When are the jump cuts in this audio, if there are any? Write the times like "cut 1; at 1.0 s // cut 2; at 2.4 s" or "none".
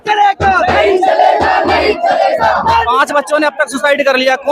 cut 1; at 2.9 s